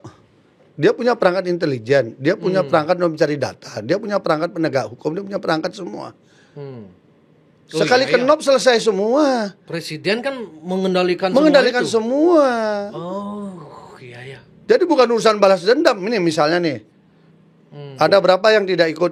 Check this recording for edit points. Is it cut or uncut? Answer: uncut